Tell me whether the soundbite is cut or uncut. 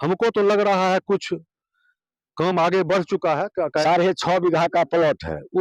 cut